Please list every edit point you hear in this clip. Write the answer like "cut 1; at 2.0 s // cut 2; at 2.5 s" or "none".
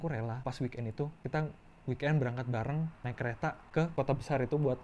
cut 1; at 1.2 s